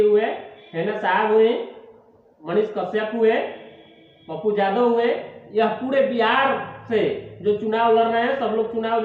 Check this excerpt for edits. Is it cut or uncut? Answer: uncut